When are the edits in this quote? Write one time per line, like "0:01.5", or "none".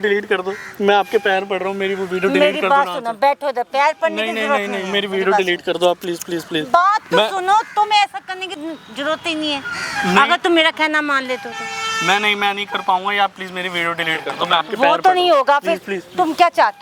none